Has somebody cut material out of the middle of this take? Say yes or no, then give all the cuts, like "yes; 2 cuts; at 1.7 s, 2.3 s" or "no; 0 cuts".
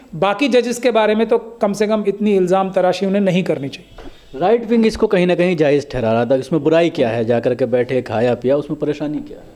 no; 0 cuts